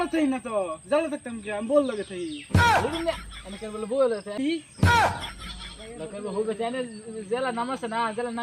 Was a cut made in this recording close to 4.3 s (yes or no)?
yes